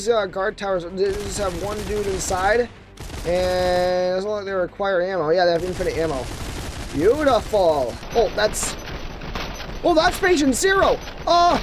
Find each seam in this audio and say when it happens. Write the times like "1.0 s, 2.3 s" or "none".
8.0 s